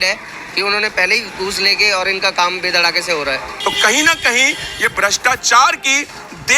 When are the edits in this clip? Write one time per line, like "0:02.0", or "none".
0:03.4